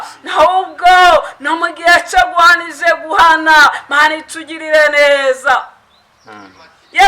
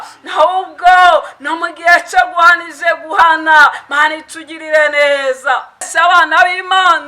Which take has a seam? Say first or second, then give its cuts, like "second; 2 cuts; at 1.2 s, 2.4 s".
second; 1 cut; at 5.9 s